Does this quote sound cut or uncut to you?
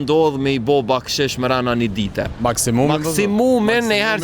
cut